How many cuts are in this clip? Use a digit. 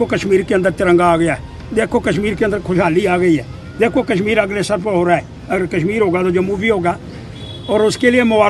0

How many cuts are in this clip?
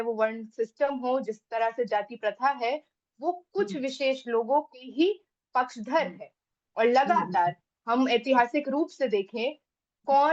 0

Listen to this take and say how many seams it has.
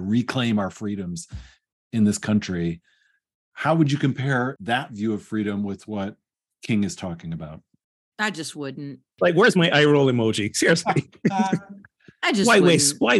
2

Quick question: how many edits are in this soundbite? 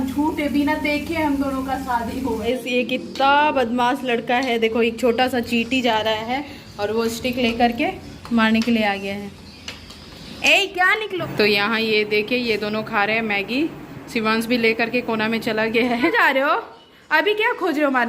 3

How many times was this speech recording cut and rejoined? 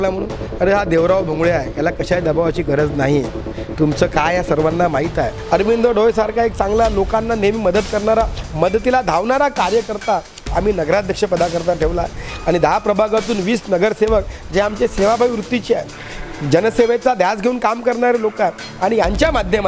1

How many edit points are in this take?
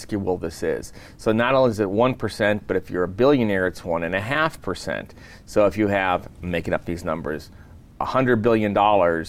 0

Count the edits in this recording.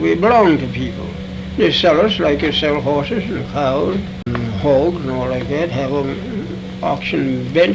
1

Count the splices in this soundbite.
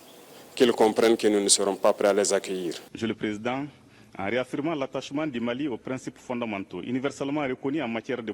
1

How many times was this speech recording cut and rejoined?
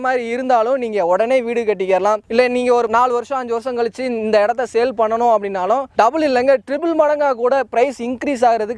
0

